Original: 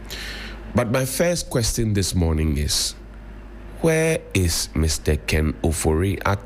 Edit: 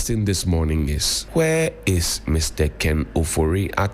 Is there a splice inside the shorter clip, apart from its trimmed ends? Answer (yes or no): yes